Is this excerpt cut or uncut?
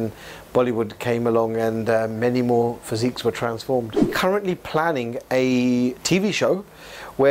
cut